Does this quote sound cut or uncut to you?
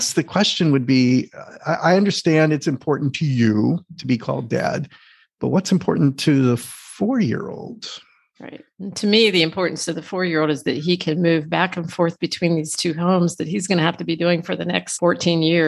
uncut